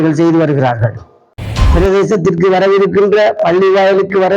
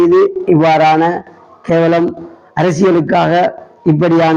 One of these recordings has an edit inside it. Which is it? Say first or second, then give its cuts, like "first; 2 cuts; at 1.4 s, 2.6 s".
first; 1 cut; at 1.5 s